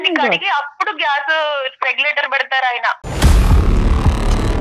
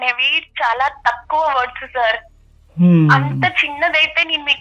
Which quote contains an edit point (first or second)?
first